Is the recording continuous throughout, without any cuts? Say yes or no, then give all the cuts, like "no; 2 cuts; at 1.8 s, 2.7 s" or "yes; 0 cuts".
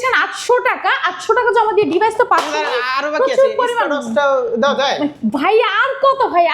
yes; 0 cuts